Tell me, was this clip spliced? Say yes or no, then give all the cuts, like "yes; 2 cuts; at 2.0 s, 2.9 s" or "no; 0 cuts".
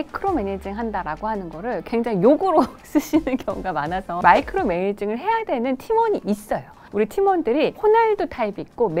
yes; 2 cuts; at 4.1 s, 6.9 s